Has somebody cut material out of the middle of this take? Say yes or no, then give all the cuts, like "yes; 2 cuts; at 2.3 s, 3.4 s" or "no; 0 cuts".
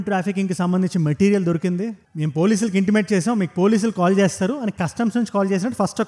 no; 0 cuts